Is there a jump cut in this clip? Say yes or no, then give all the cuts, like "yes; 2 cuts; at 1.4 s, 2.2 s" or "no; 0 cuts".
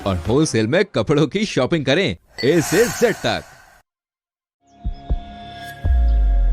no; 0 cuts